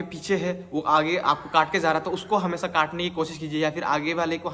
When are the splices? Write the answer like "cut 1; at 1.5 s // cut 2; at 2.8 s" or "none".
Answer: none